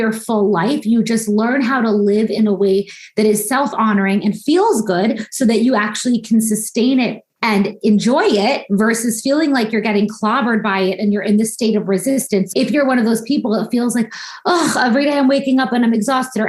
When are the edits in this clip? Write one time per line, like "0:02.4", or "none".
none